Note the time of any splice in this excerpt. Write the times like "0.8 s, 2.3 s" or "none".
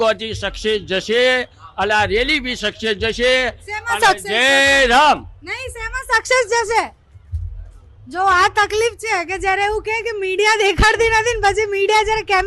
none